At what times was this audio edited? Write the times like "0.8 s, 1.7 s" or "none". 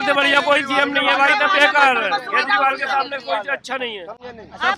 none